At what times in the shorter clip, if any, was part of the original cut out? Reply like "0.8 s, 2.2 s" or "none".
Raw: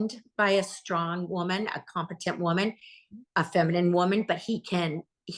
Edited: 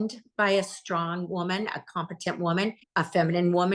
2.8 s